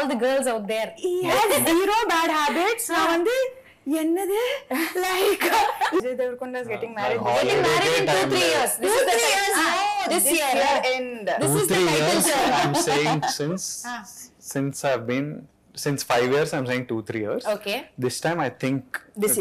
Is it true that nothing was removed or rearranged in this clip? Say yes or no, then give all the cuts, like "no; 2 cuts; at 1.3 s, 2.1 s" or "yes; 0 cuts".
no; 1 cut; at 6.0 s